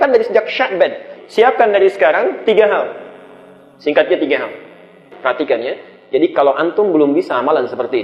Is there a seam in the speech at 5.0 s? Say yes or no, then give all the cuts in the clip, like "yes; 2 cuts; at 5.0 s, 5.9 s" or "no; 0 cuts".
yes; 1 cut; at 5.0 s